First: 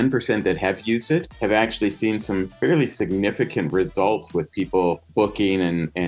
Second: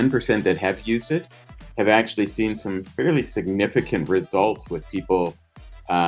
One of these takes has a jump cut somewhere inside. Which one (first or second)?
first